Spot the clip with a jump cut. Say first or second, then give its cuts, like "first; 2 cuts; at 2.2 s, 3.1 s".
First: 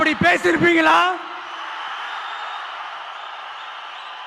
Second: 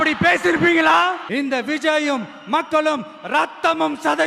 second; 1 cut; at 1.2 s